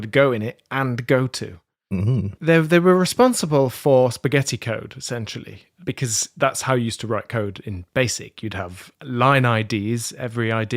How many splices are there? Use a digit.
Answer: 2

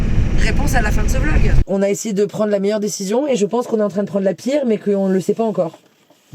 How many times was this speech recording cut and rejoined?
1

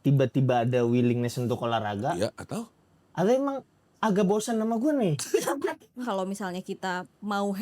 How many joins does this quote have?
1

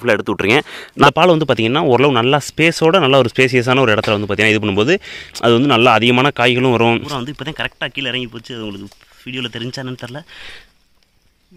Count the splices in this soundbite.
2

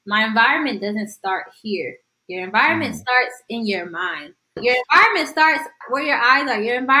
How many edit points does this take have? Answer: 2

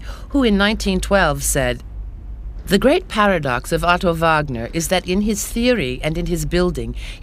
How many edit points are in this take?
1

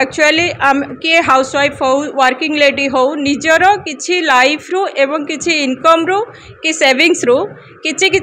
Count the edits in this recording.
0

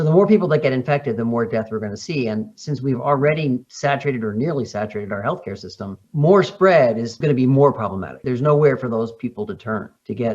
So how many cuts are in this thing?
0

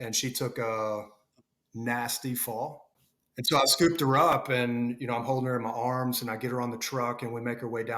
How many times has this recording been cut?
1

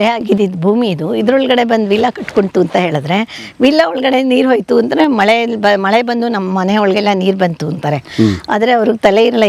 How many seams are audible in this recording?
0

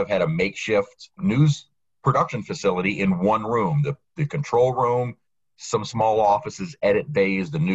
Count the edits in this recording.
1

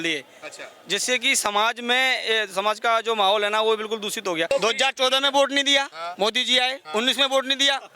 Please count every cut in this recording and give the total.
1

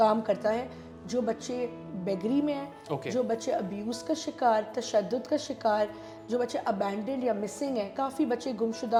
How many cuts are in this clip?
0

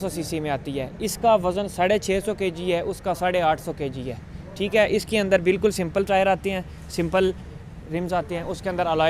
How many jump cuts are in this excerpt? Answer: 0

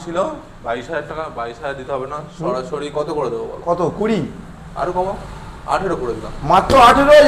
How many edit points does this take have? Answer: 0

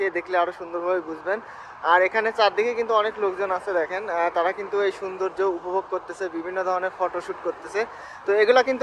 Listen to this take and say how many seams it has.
0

